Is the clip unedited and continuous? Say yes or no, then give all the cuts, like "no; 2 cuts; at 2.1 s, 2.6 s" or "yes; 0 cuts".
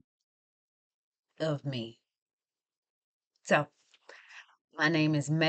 yes; 0 cuts